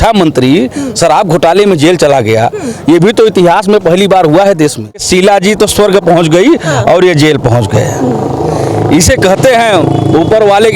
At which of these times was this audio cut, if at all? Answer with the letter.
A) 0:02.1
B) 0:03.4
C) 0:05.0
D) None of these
C